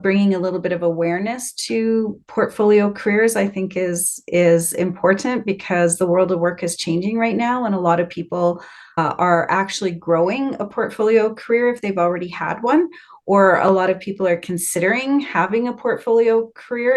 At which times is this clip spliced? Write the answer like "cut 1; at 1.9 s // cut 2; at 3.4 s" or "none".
none

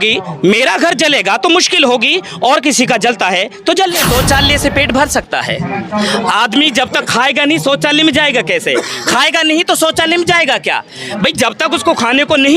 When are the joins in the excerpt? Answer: cut 1; at 4.0 s

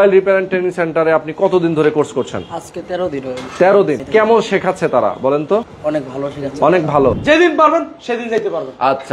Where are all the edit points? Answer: cut 1; at 4.0 s // cut 2; at 5.7 s // cut 3; at 7.2 s

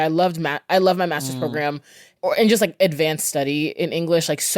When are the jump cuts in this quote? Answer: cut 1; at 2.1 s

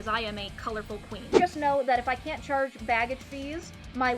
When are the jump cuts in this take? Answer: cut 1; at 1.2 s

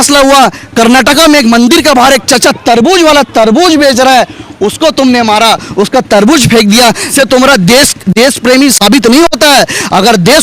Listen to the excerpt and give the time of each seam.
cut 1; at 7.1 s

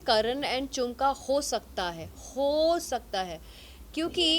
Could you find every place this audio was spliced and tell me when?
none

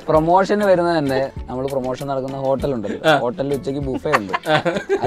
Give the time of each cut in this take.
cut 1; at 1.3 s

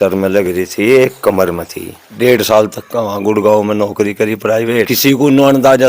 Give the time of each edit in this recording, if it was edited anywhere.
cut 1; at 2.1 s // cut 2; at 4.9 s

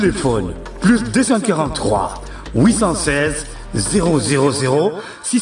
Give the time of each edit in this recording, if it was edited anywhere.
none

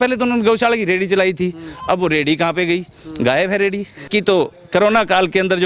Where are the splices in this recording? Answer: cut 1; at 4.1 s

